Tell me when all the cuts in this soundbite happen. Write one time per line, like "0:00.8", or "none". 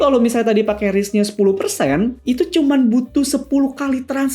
0:02.2